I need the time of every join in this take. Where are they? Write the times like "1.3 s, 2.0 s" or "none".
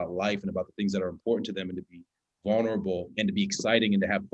3.1 s